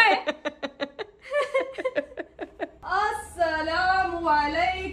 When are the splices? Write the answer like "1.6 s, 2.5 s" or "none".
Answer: none